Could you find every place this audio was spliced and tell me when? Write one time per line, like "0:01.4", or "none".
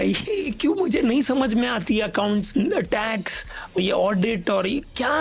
0:02.5
0:03.8